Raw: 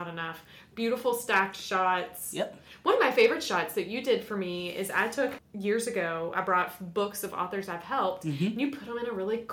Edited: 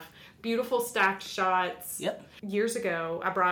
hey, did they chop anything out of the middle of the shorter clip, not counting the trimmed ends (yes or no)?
yes